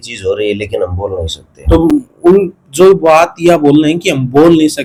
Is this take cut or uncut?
uncut